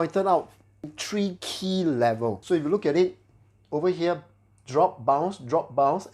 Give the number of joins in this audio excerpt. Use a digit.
2